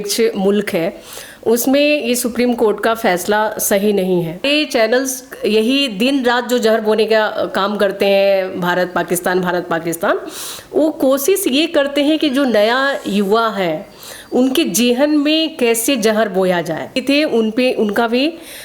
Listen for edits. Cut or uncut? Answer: cut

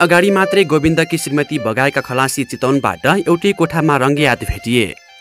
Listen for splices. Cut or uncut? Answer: uncut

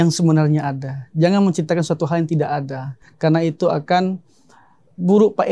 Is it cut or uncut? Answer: uncut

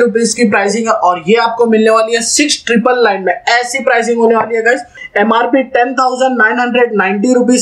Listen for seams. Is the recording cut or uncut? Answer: cut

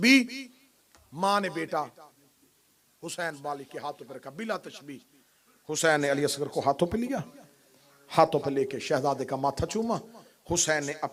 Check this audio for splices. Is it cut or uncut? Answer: uncut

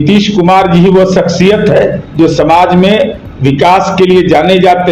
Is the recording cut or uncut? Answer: cut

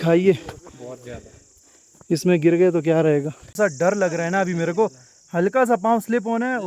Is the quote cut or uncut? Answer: cut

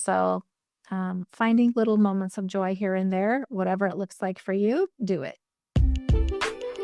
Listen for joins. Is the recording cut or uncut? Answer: cut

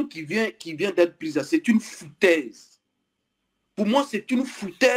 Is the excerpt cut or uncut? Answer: uncut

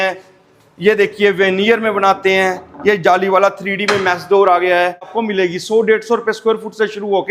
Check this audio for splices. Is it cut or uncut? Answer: cut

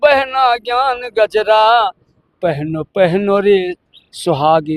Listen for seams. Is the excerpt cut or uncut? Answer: uncut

